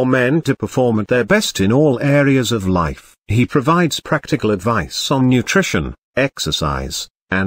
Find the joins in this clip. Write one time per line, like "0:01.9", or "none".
0:03.6

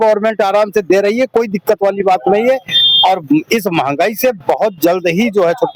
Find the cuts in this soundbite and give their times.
none

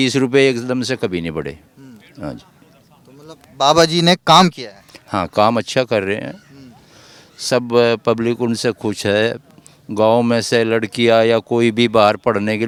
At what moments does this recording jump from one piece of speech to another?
none

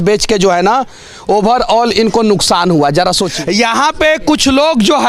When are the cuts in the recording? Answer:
0:03.3

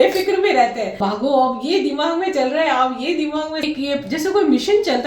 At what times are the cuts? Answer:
0:01.0
0:03.6

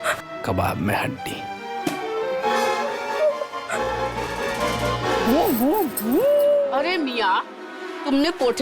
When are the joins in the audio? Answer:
0:05.2

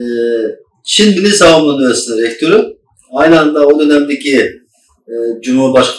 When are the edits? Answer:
none

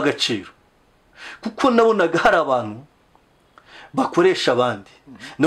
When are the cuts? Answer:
none

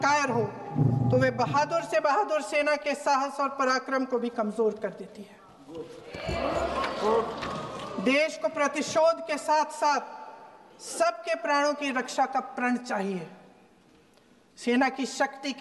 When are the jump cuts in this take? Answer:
none

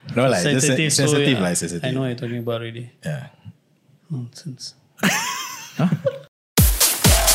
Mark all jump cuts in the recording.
0:06.3

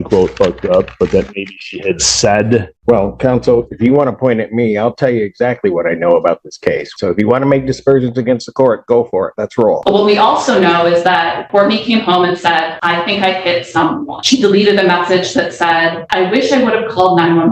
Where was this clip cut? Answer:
0:02.7
0:06.9
0:09.8
0:11.4
0:12.7
0:14.1
0:16.0

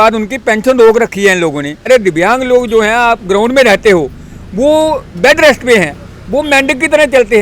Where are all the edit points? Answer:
0:01.8

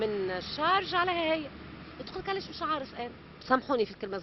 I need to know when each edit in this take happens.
0:03.3

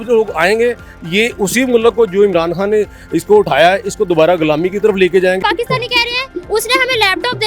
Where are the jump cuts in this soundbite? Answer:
0:05.4

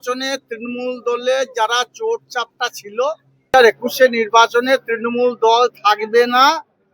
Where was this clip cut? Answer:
0:03.5

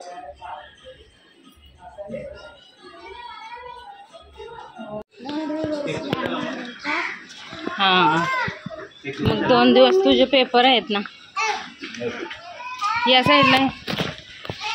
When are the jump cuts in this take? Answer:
0:05.0

